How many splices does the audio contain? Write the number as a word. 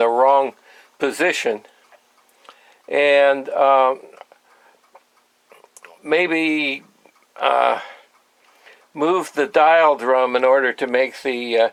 zero